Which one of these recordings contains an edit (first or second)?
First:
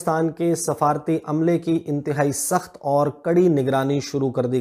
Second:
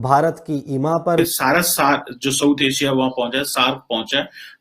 second